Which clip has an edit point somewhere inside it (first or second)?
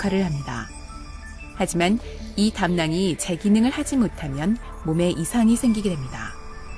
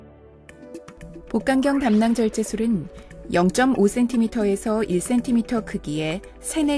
second